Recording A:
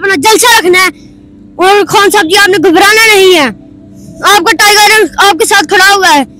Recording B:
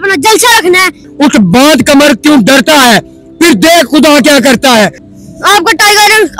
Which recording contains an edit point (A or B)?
B